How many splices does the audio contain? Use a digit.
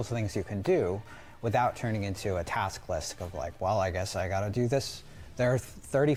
0